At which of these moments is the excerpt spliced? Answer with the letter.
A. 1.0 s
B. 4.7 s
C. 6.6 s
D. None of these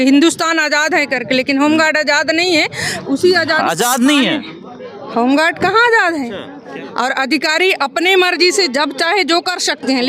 C